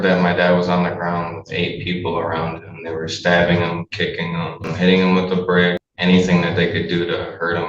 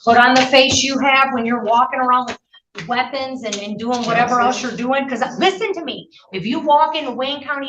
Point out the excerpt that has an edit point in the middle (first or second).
first